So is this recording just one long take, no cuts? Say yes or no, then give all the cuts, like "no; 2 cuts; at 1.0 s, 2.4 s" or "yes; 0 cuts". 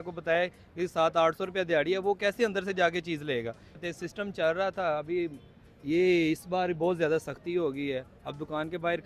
no; 1 cut; at 3.6 s